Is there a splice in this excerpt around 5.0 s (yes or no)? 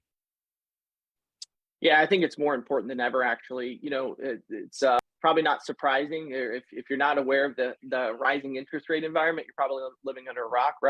yes